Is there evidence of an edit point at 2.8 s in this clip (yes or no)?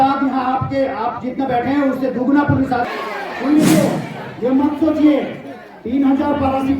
yes